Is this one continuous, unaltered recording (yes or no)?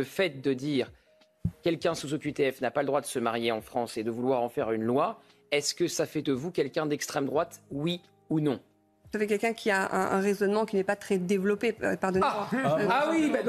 no